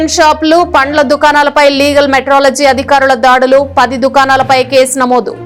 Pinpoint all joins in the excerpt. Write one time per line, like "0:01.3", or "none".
none